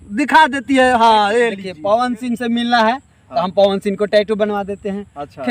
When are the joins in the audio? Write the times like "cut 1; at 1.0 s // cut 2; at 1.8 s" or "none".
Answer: cut 1; at 1.7 s